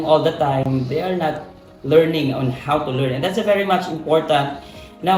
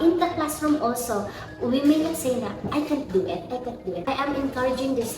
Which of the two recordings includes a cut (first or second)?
second